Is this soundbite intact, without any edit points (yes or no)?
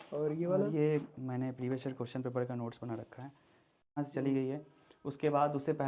no